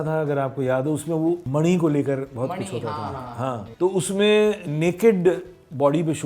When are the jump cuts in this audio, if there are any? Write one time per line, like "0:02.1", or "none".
0:01.4
0:03.6